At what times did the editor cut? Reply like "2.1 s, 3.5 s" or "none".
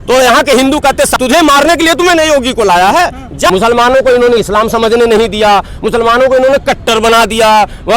1.1 s, 3.5 s